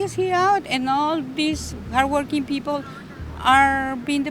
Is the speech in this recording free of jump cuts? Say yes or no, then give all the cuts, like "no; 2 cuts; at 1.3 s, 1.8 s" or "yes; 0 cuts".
yes; 0 cuts